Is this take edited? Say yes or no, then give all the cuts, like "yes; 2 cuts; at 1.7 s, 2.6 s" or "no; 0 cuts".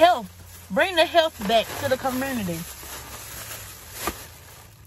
no; 0 cuts